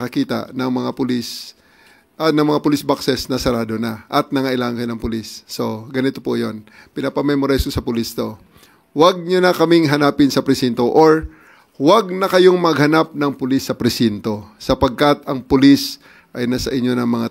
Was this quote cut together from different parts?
no; 0 cuts

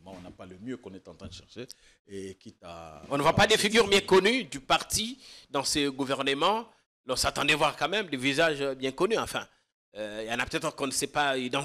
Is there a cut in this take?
no; 0 cuts

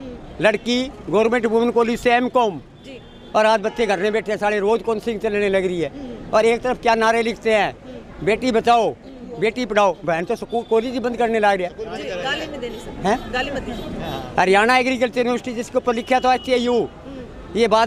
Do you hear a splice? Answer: no; 0 cuts

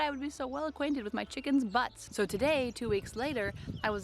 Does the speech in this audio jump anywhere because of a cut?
yes; 1 cut; at 2.0 s

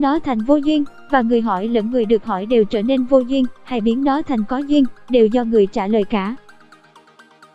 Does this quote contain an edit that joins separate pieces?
yes; 1 cut; at 6.4 s

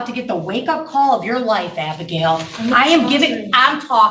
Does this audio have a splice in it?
no; 0 cuts

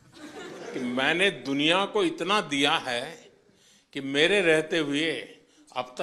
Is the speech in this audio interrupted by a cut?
no; 0 cuts

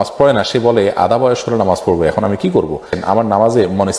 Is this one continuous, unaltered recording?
no; 1 cut; at 2.9 s

